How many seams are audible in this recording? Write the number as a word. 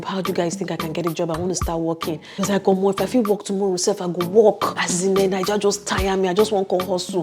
two